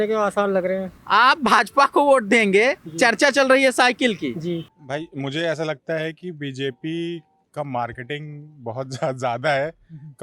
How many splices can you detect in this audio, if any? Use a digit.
2